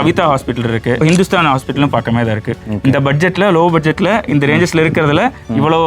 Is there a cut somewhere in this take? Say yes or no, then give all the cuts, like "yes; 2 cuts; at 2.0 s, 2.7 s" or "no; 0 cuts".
yes; 2 cuts; at 1.0 s, 2.7 s